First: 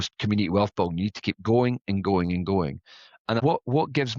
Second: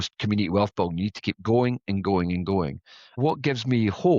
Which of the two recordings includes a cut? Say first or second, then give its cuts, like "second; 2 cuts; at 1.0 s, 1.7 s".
second; 1 cut; at 3.1 s